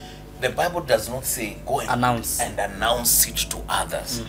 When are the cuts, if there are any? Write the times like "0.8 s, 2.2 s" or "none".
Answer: none